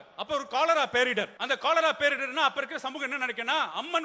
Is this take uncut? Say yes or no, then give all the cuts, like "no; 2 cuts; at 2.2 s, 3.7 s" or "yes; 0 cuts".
no; 1 cut; at 1.4 s